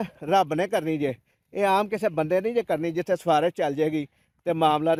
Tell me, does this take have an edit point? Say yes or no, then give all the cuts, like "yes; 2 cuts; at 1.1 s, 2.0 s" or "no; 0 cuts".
no; 0 cuts